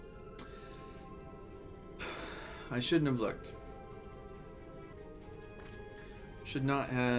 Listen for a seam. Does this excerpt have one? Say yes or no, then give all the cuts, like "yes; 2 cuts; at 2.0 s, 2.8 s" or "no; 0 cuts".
yes; 1 cut; at 4.9 s